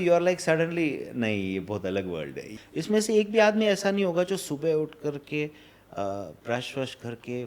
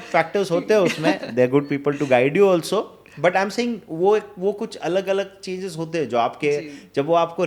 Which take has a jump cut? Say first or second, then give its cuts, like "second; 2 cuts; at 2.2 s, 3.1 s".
first; 1 cut; at 2.5 s